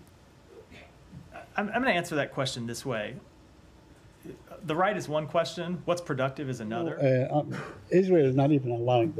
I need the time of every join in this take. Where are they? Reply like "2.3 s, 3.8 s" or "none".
6.9 s

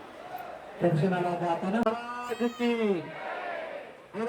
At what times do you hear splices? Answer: 1.8 s

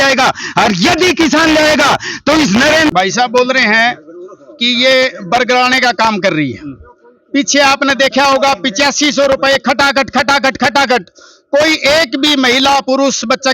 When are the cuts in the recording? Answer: 2.9 s

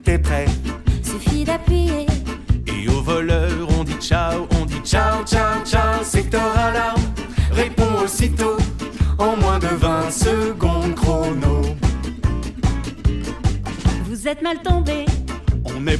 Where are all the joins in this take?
none

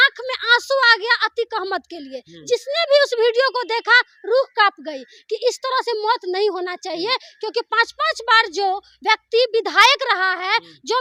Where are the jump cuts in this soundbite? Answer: none

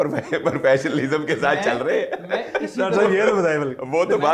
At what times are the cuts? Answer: none

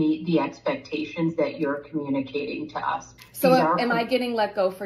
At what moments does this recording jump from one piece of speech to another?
3.2 s

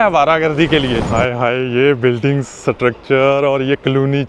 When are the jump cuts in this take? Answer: 1.1 s

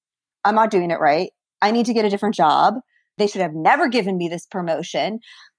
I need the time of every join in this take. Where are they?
3.1 s

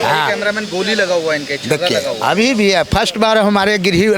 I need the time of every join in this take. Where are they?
none

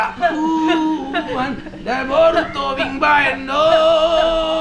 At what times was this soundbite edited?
none

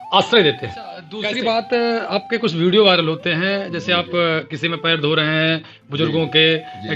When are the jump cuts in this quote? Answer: 1.0 s

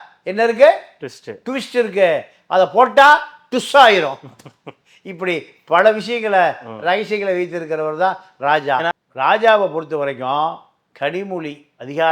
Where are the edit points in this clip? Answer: 8.9 s

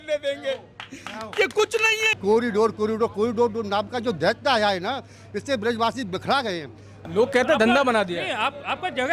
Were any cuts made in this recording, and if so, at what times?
2.2 s, 7.1 s

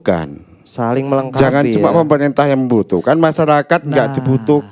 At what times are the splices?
none

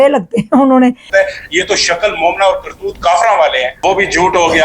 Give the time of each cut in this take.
1.0 s, 3.7 s

